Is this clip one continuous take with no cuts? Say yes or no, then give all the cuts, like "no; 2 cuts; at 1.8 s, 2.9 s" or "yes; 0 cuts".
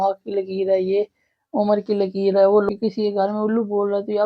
no; 1 cut; at 2.7 s